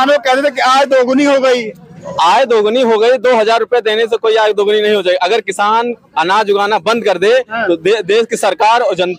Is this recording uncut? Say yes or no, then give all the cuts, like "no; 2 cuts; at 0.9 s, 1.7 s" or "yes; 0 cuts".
yes; 0 cuts